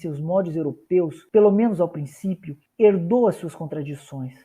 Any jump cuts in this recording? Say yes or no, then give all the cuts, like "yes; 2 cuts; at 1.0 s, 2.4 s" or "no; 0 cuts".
no; 0 cuts